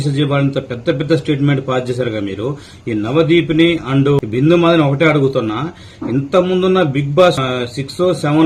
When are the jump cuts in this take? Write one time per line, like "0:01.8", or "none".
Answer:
0:04.2
0:07.4